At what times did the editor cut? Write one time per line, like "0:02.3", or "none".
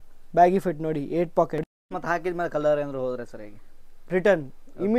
0:01.8